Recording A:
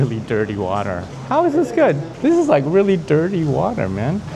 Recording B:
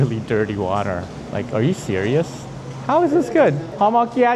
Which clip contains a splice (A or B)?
A